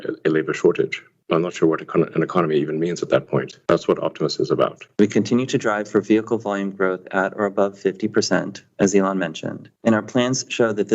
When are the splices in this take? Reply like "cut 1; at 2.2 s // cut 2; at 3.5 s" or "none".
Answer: cut 1; at 4.8 s